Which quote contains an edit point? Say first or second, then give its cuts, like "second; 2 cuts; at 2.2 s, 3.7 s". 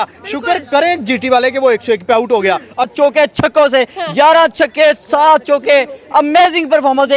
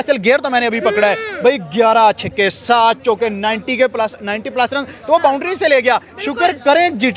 first; 1 cut; at 2.9 s